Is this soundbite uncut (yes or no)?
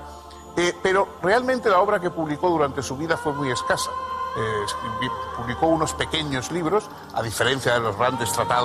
yes